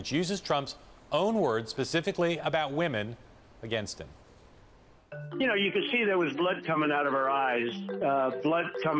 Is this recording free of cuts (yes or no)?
yes